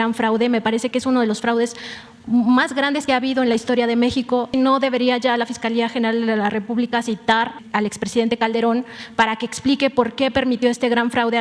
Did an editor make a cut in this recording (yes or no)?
yes